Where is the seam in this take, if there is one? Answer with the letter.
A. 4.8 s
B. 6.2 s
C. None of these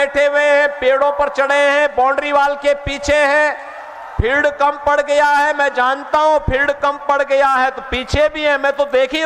C